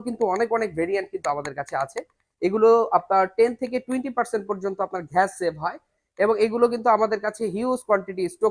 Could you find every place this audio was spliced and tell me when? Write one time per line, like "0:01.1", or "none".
none